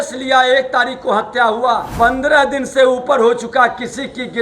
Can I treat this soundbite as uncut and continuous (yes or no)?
no